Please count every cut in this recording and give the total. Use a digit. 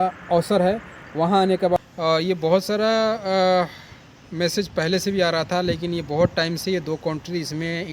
1